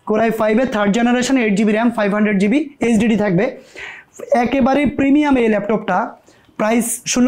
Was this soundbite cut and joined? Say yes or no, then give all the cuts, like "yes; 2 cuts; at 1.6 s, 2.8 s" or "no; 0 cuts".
no; 0 cuts